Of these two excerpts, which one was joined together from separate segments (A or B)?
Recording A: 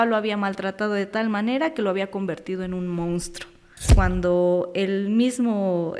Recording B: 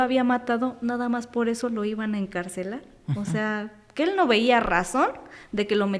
A